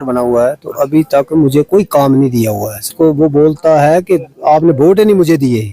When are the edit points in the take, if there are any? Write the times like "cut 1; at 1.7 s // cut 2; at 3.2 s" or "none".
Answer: cut 1; at 2.9 s